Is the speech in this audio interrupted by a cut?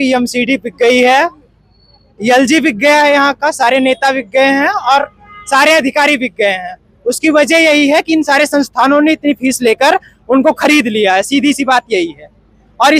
no; 0 cuts

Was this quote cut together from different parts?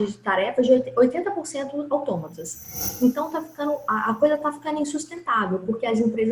yes; 1 cut; at 2.8 s

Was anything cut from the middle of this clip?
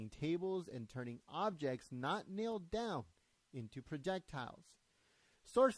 yes; 1 cut; at 3.1 s

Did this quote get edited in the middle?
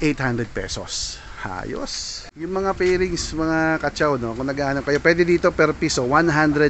yes; 1 cut; at 2.5 s

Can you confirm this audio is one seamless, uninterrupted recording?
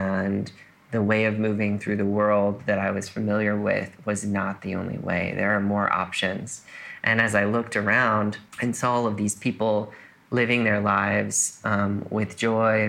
no; 1 cut; at 8.5 s

